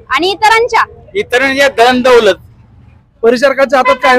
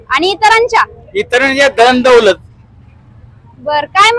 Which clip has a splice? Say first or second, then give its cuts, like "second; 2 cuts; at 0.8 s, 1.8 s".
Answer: first; 1 cut; at 3.0 s